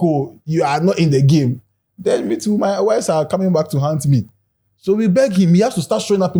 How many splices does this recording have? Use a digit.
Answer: 0